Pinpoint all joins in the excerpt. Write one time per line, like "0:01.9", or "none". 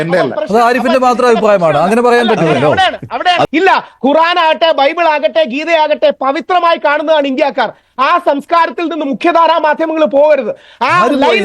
0:03.5